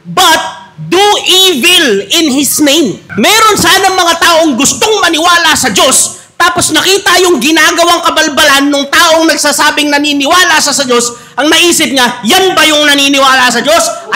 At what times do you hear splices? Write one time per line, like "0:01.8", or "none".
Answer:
0:03.0